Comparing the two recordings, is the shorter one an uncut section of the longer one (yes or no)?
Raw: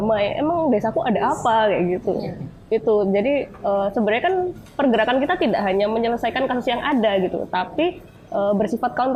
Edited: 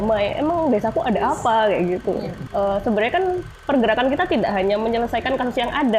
no